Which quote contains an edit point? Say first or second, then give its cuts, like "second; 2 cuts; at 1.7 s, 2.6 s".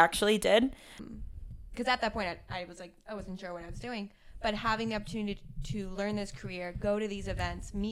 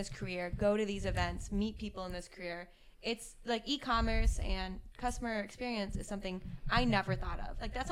first; 1 cut; at 1.0 s